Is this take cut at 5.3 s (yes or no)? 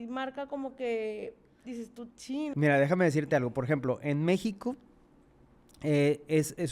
no